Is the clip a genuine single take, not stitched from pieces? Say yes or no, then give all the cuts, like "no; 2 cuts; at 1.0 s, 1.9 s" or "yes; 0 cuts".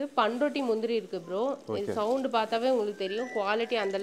yes; 0 cuts